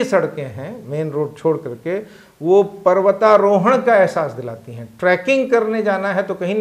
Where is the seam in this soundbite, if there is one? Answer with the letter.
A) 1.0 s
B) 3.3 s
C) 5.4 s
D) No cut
D